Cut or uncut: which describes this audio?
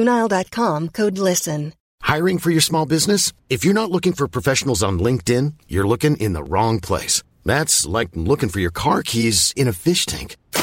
cut